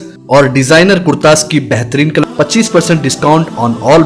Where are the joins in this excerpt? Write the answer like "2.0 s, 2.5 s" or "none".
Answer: 2.2 s